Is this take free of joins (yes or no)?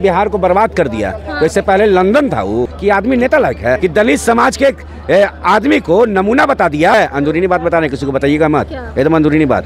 no